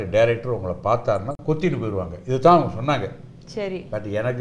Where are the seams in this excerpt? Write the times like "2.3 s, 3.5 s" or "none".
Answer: none

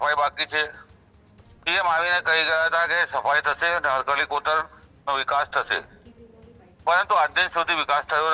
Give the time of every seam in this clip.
none

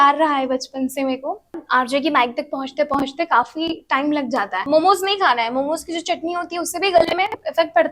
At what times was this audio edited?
1.6 s, 4.7 s

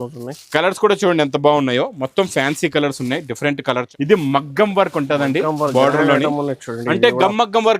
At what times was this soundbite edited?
3.9 s

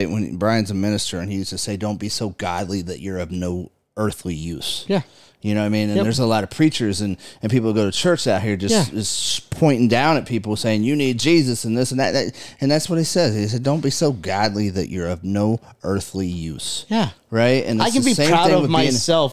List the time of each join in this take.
none

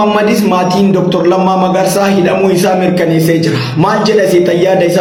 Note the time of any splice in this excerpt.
none

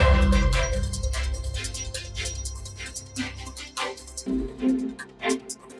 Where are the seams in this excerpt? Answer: none

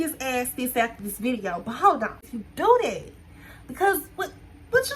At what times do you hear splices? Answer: 2.3 s

